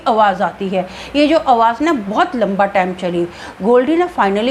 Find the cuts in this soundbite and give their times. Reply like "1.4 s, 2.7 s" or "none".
none